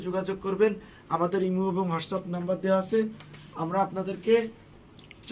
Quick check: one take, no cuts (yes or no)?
yes